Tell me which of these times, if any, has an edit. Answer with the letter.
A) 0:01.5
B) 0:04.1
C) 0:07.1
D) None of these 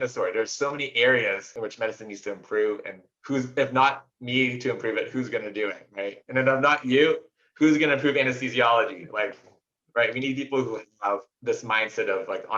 A